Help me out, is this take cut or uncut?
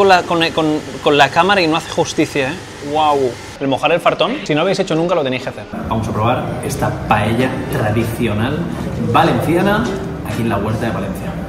cut